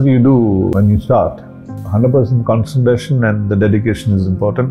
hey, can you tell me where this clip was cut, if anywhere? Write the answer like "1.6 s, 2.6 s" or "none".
0.7 s, 1.8 s